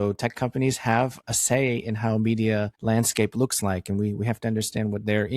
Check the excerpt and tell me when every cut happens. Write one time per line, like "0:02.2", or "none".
0:01.3
0:02.7